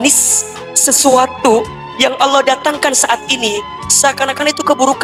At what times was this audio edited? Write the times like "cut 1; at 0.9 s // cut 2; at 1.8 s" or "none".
none